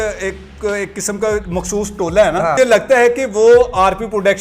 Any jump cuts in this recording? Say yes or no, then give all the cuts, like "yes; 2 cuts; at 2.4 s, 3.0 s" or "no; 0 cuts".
yes; 1 cut; at 2.5 s